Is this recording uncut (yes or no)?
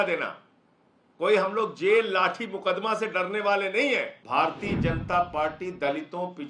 no